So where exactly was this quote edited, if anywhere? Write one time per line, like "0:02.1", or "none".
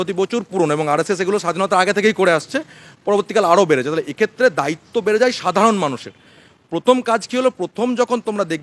none